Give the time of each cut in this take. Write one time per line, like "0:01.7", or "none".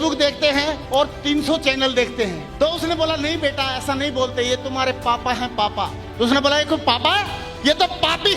0:02.4

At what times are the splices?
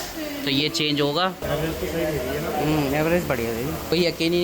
0:01.4

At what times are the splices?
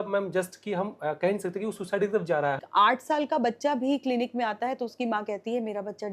0:02.6

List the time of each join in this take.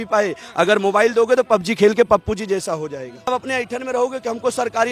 0:03.3

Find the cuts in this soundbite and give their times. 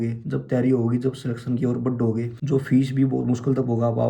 0:02.4

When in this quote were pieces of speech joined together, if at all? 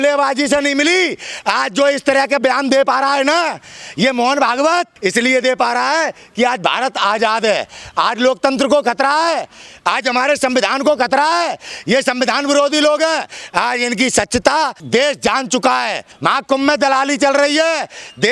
0:13.4
0:14.8
0:16.1

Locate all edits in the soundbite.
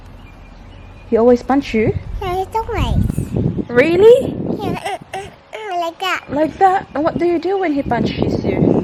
none

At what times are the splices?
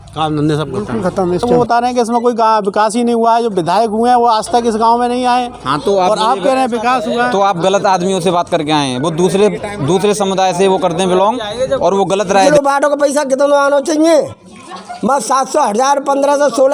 0:01.4
0:12.4

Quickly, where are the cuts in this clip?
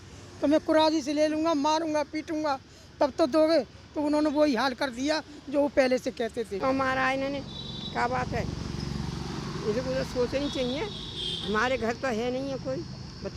0:06.6

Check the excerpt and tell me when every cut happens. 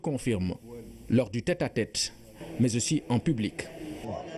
0:02.6

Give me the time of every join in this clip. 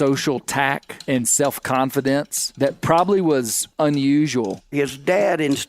0:04.7

